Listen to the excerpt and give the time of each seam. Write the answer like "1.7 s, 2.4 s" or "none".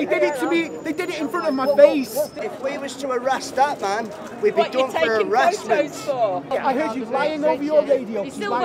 2.4 s, 6.5 s